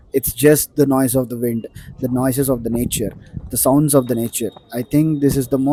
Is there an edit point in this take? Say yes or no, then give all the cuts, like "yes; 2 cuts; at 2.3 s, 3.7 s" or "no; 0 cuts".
no; 0 cuts